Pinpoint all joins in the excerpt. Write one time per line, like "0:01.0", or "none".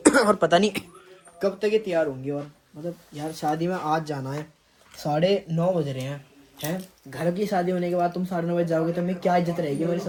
none